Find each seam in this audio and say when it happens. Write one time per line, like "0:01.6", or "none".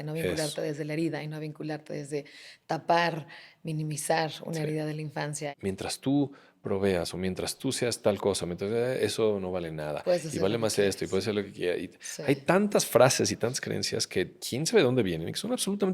0:05.5